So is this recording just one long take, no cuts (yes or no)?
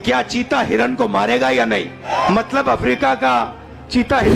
no